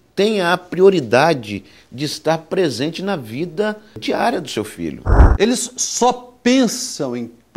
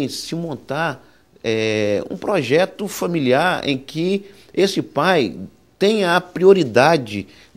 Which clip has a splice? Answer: first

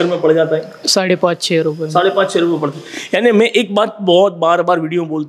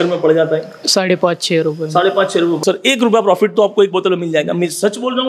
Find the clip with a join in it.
second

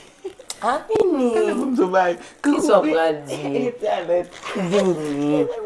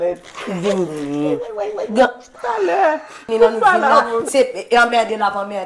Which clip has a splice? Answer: second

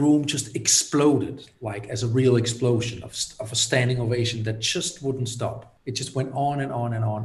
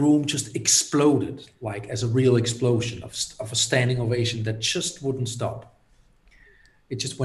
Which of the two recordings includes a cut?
first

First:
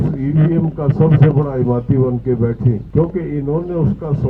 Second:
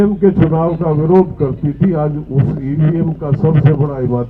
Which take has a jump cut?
first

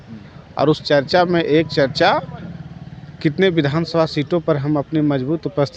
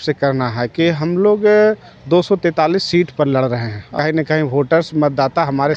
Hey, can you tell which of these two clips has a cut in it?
second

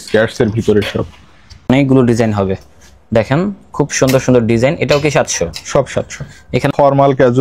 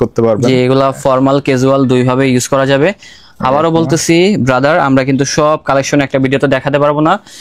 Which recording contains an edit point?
first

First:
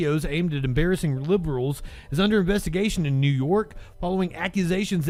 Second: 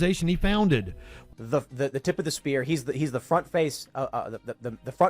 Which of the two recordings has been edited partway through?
second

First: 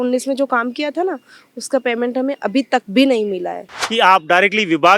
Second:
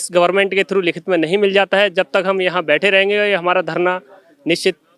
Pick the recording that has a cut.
first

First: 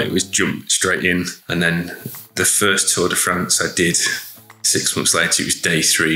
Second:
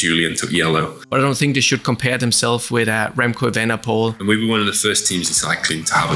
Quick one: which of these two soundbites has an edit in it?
second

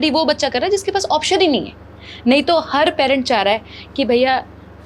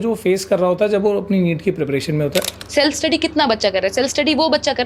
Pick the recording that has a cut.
second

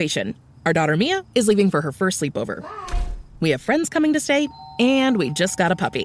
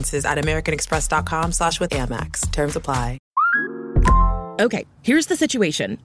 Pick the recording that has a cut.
second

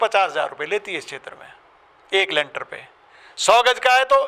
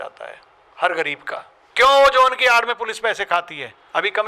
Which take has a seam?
second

